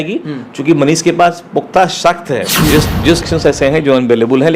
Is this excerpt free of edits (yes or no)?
no